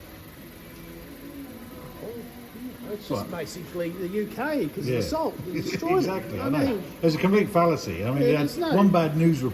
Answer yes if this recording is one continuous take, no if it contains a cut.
yes